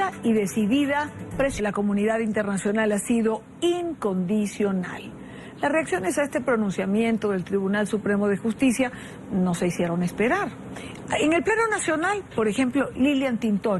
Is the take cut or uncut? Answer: uncut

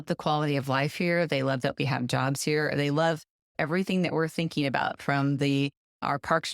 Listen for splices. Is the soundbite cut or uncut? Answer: uncut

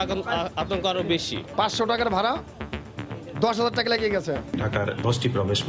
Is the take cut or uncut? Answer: cut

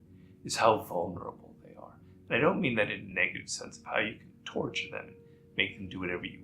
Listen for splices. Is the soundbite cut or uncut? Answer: cut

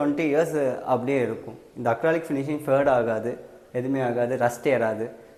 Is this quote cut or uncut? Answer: uncut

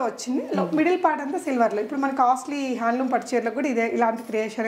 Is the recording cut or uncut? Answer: uncut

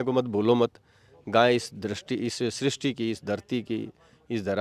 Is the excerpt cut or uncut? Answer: uncut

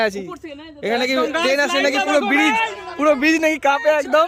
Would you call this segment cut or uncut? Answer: uncut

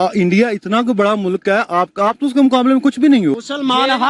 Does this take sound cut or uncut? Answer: uncut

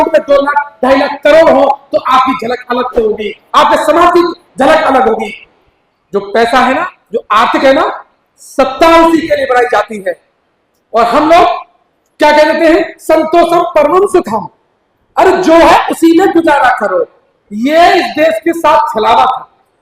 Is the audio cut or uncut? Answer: uncut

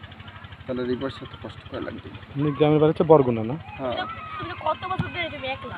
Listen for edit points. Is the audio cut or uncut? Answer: uncut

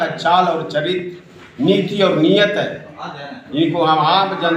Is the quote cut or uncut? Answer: uncut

